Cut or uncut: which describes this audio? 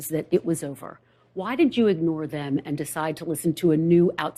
uncut